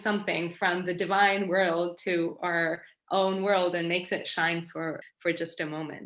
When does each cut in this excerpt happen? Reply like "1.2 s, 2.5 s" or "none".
5.1 s